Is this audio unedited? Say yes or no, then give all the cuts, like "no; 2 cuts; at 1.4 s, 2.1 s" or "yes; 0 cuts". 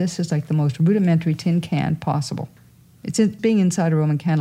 no; 1 cut; at 2.6 s